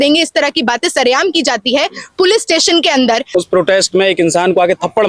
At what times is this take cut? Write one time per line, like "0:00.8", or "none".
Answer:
0:03.2